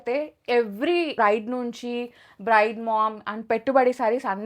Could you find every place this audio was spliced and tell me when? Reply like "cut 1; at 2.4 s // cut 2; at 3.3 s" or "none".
cut 1; at 1.1 s